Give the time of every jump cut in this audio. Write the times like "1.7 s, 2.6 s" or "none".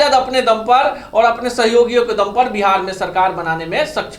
none